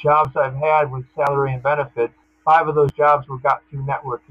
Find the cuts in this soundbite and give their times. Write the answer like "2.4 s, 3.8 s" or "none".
2.3 s